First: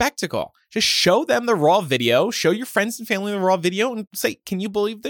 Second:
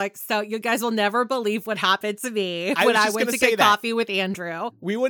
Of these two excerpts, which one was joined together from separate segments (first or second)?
first